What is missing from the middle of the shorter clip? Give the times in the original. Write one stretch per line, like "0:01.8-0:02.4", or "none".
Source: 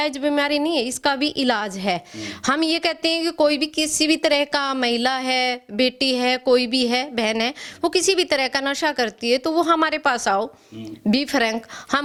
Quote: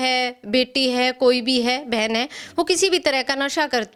none